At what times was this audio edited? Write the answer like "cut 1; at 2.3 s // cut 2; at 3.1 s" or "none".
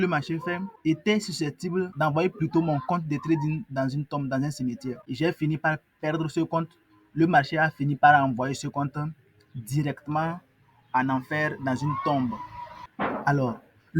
cut 1; at 5.0 s

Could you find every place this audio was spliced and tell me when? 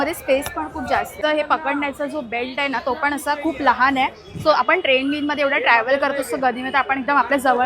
cut 1; at 1.2 s

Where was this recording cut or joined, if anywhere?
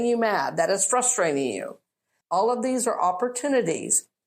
cut 1; at 2.1 s

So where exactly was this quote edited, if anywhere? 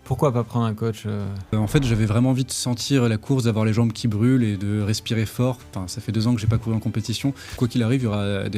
cut 1; at 1.5 s // cut 2; at 7.5 s

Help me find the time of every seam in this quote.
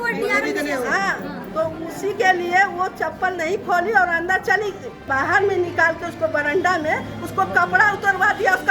cut 1; at 5.1 s

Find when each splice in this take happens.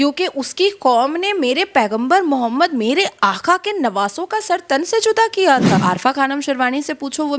cut 1; at 5.8 s

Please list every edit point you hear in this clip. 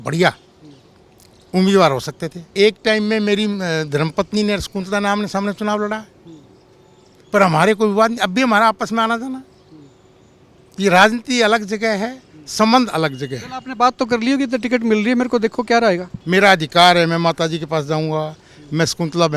cut 1; at 2.5 s // cut 2; at 16.2 s

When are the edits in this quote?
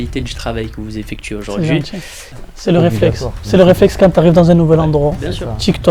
cut 1; at 2.4 s

